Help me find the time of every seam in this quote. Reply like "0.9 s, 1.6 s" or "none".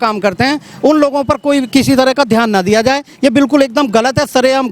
none